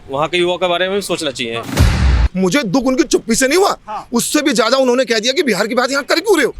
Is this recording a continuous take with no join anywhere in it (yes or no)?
no